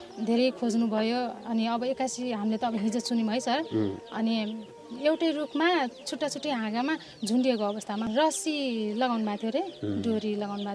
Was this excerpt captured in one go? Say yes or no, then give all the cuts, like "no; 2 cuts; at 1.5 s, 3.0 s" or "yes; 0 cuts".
no; 2 cuts; at 4.8 s, 8.0 s